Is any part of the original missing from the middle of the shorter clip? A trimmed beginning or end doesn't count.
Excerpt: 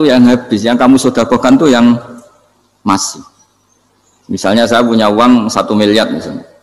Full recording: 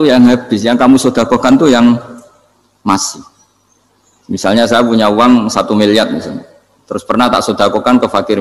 no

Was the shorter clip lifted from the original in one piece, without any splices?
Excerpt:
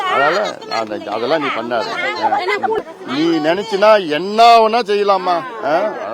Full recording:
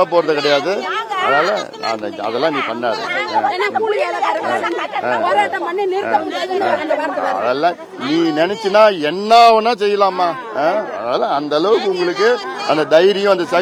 no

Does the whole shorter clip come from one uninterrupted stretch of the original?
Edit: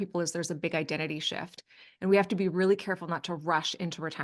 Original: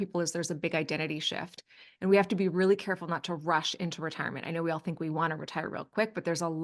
yes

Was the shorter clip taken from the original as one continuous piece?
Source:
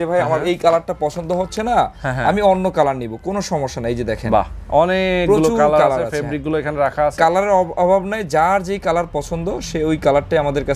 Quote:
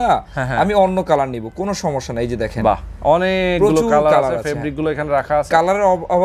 yes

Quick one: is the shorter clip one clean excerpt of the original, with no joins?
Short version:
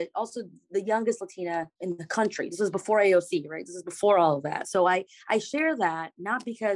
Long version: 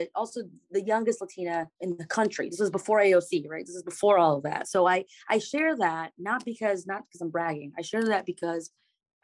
yes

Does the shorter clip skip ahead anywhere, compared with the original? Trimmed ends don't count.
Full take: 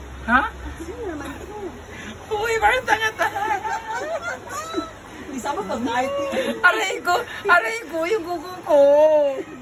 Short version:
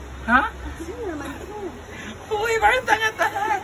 no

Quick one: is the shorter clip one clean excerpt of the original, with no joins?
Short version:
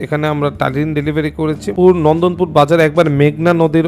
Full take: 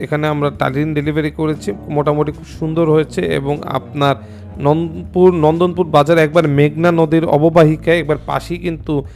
no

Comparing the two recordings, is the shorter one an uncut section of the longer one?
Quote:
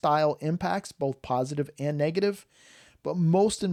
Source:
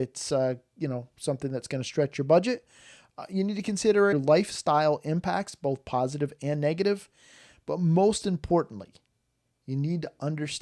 yes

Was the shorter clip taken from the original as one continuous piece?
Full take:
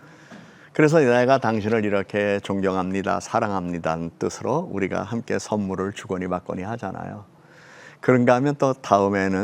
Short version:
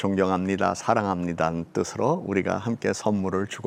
yes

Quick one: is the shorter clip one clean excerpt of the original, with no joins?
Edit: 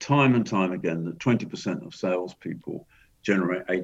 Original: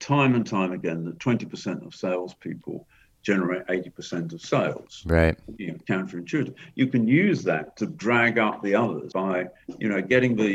yes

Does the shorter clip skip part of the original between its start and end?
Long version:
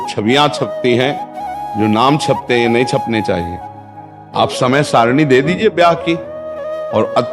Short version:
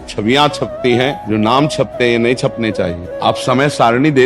yes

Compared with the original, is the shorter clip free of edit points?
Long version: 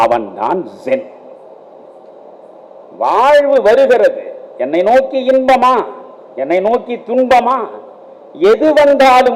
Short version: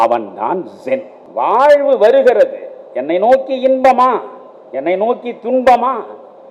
no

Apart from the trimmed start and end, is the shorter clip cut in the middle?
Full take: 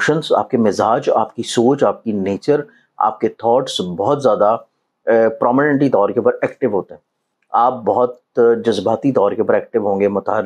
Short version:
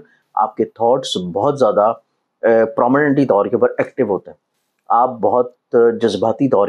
no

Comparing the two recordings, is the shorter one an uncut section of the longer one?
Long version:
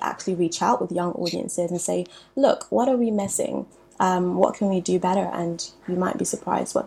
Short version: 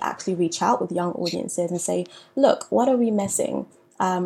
yes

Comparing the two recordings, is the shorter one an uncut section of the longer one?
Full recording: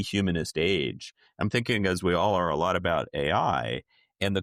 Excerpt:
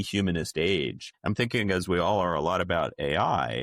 no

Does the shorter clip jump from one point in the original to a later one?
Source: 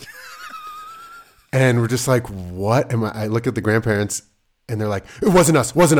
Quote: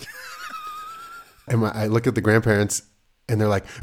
yes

